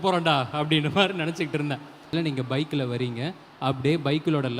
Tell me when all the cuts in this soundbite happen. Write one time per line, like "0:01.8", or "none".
0:02.1